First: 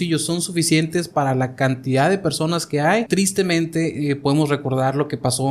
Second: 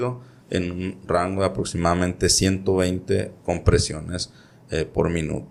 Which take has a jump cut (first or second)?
first